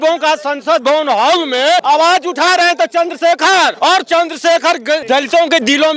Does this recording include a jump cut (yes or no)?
yes